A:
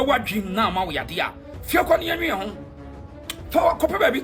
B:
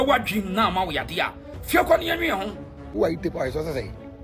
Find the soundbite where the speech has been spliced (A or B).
B